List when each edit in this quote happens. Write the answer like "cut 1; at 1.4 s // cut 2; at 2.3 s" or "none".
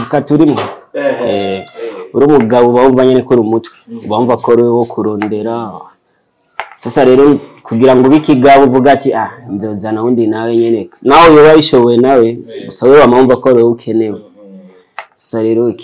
none